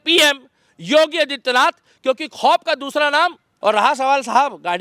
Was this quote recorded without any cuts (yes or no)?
no